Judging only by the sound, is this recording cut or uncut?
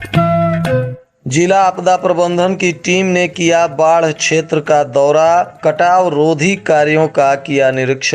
cut